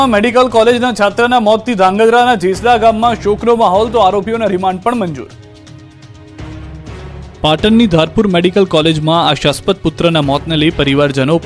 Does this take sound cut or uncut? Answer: uncut